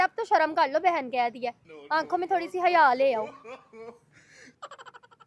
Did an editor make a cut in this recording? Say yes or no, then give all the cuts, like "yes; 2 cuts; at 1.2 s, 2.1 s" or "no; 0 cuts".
no; 0 cuts